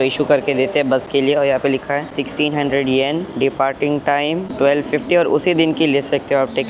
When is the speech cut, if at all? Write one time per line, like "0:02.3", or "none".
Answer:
none